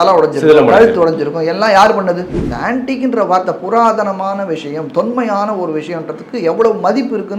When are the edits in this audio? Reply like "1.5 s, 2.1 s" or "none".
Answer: 2.4 s